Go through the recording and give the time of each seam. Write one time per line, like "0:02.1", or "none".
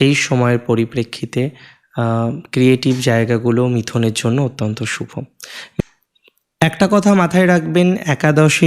0:05.8